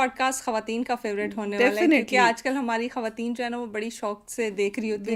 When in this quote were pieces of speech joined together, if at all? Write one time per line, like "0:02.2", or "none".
none